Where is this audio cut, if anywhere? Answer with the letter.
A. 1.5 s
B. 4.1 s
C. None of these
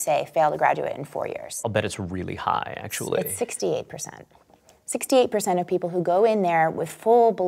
A